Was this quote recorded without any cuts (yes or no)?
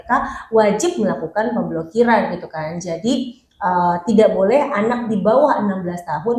yes